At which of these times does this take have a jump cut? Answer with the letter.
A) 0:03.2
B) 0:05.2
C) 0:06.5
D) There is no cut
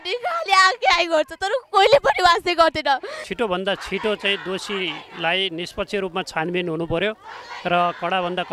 A